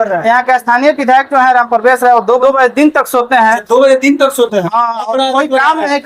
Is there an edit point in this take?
yes; 1 cut; at 2.4 s

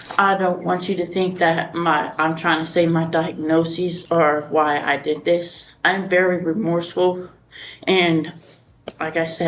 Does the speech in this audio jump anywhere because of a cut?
no; 0 cuts

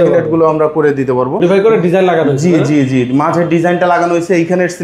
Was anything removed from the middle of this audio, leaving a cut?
yes; 1 cut; at 1.4 s

